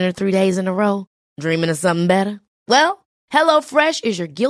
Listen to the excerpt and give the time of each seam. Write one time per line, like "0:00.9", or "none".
none